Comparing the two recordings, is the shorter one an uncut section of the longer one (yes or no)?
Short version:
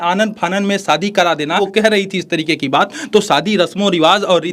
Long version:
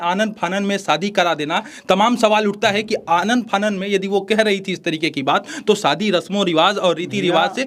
no